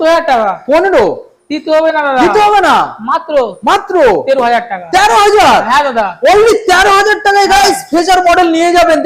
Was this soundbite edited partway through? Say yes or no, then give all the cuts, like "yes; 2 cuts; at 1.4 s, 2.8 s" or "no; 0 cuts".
no; 0 cuts